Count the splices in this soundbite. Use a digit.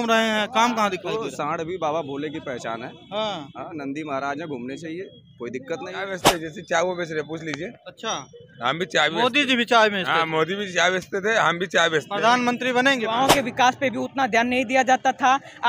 2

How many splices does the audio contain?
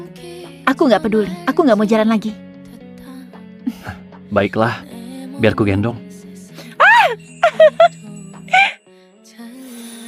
0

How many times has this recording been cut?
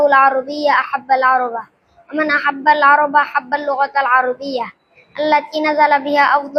0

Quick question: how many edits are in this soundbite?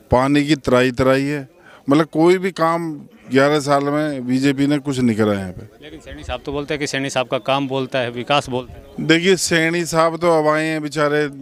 0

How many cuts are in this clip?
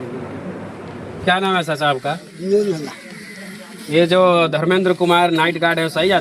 1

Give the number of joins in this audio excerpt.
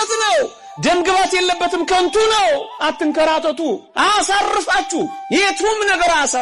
3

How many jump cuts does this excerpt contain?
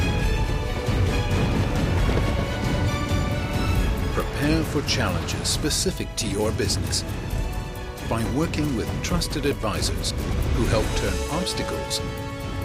0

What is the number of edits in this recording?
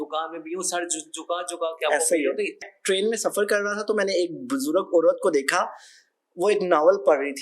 1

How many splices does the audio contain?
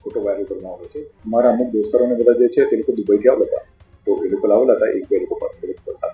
1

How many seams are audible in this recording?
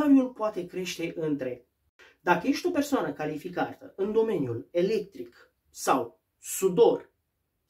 1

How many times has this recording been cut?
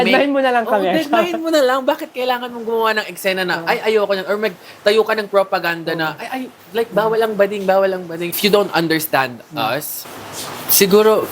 2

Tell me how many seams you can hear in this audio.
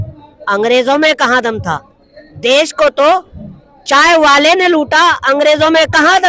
0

